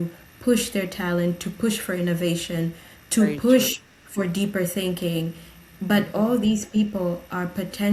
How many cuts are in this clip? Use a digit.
0